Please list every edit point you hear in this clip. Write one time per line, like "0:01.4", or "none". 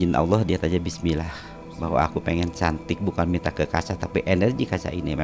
none